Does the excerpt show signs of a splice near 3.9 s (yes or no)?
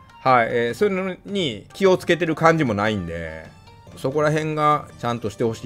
yes